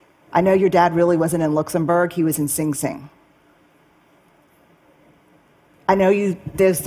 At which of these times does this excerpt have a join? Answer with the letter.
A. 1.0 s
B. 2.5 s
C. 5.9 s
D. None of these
D